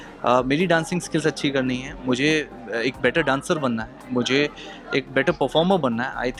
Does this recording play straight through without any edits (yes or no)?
yes